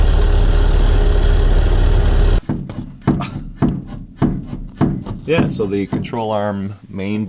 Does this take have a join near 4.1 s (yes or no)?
no